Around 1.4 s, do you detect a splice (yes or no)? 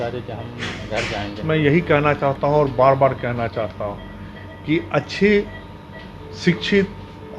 yes